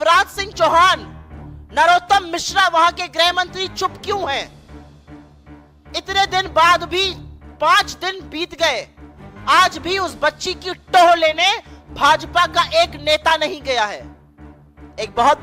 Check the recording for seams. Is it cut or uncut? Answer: uncut